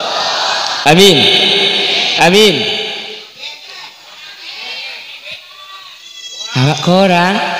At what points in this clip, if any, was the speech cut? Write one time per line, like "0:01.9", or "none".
0:02.9